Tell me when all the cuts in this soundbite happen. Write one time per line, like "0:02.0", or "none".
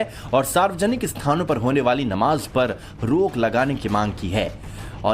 none